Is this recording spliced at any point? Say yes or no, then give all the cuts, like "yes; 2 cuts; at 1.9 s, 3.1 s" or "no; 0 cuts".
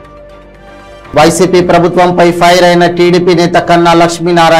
no; 0 cuts